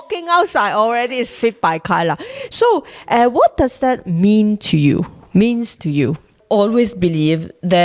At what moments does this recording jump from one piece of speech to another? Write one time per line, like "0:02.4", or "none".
0:06.3